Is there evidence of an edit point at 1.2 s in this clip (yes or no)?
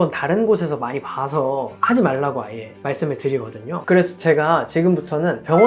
no